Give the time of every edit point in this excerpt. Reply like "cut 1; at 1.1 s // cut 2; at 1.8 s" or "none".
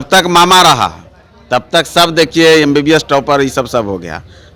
none